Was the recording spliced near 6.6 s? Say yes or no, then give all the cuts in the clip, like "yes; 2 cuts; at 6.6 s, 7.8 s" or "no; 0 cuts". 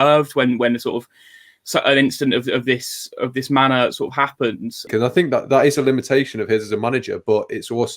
no; 1 cut; at 4.9 s